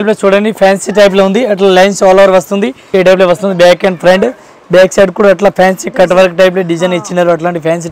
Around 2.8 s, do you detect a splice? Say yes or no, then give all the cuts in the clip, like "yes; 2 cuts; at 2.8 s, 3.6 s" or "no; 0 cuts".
yes; 1 cut; at 2.8 s